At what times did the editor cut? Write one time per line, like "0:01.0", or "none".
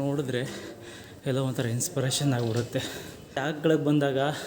0:03.4

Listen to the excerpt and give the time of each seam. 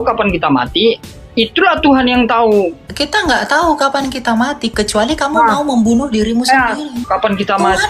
0:02.8
0:07.0

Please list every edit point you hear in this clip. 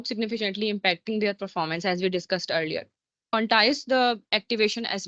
0:03.2

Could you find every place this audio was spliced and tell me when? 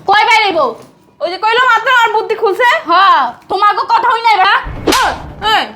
0:04.5

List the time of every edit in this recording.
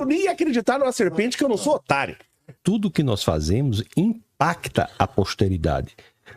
0:02.5

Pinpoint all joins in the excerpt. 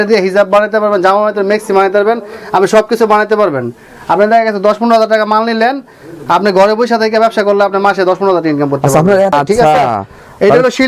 0:09.3

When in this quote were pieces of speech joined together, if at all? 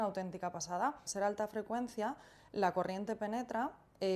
0:01.0

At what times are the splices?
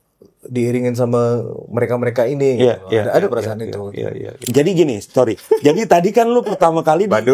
0:04.4

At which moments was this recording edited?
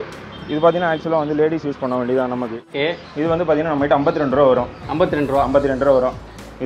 0:02.6

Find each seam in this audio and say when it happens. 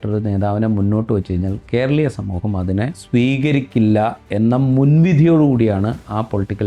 0:03.0

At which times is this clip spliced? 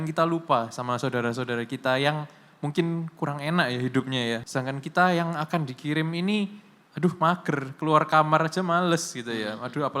0:04.4

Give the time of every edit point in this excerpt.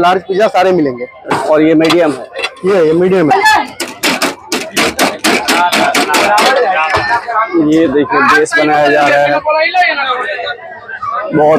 0:01.3
0:03.3

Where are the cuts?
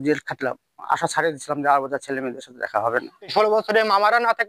0:00.9
0:03.3

